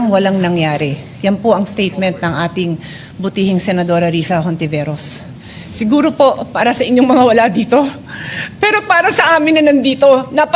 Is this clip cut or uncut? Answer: uncut